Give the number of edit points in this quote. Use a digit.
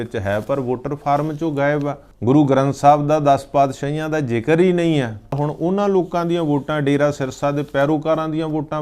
2